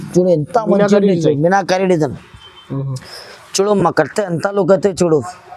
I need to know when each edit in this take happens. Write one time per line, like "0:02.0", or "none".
none